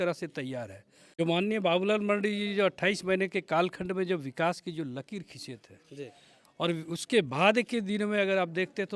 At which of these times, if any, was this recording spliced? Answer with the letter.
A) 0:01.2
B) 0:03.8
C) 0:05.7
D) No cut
A